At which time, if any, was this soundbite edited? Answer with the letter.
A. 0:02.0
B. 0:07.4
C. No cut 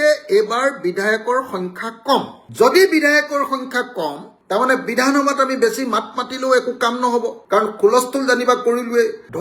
C